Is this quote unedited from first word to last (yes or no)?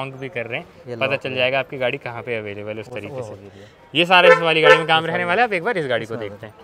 yes